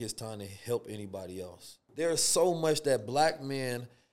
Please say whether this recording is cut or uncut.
cut